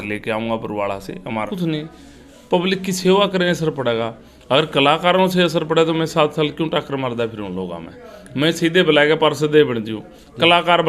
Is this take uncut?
no; 1 cut; at 1.5 s

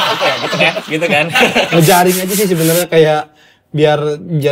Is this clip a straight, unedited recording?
no; 1 cut; at 1.7 s

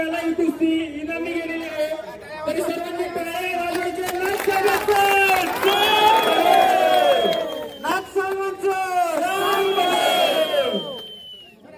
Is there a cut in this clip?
no; 0 cuts

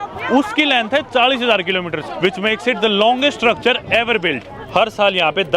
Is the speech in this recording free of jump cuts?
no; 2 cuts; at 2.1 s, 4.5 s

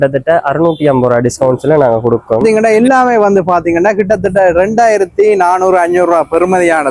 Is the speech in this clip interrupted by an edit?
yes; 1 cut; at 2.4 s

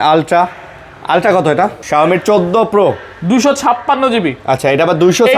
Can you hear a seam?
yes; 1 cut; at 1.8 s

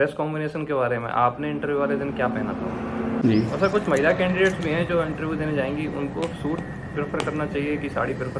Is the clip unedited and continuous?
no; 1 cut; at 3.2 s

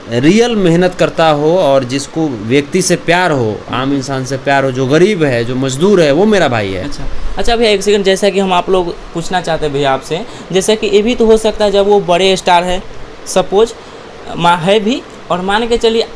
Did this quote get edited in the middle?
no; 0 cuts

